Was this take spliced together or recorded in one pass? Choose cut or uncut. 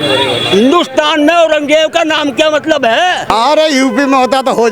cut